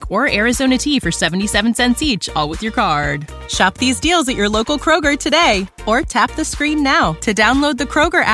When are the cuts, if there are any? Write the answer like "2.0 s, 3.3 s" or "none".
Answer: none